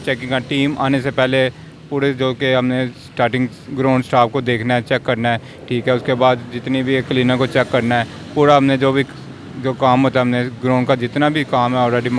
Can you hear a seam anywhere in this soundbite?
no; 0 cuts

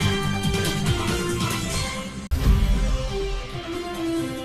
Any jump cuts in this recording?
yes; 1 cut; at 2.2 s

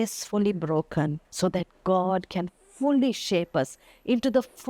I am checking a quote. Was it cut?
yes; 1 cut; at 1.2 s

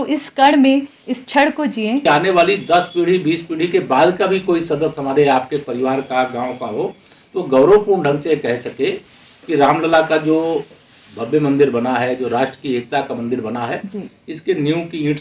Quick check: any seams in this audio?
yes; 1 cut; at 2.1 s

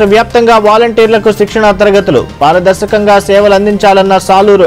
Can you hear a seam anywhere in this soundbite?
no; 0 cuts

